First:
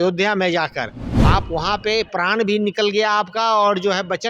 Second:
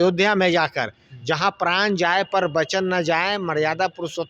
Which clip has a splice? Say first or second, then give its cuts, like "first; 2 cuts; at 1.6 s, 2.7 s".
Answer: first; 1 cut; at 1.1 s